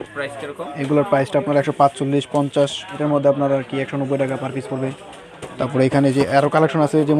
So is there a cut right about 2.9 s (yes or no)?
yes